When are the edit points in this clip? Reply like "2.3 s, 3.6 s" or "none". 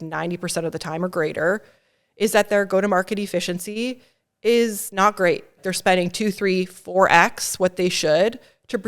5.5 s